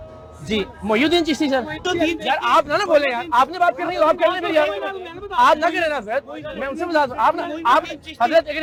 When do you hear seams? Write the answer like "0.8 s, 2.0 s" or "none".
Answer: none

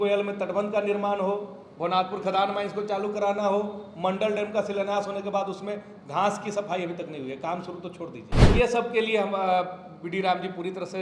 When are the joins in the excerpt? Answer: 8.3 s

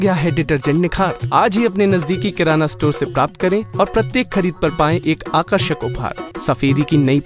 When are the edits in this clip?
6.2 s

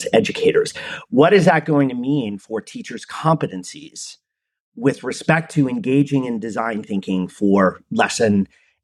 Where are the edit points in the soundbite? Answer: none

